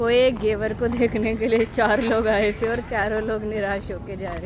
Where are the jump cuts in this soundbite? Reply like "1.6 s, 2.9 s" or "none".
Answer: none